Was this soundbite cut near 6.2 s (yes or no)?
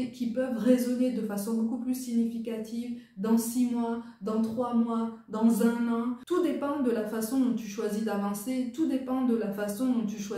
yes